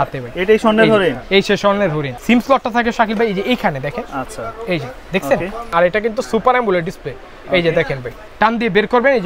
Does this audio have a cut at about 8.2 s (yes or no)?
yes